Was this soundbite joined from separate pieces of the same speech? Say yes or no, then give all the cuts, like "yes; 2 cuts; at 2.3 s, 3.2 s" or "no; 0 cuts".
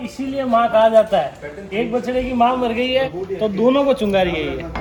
no; 0 cuts